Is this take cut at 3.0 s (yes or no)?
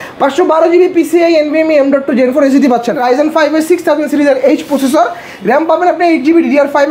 yes